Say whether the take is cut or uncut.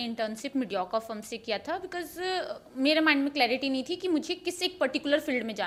uncut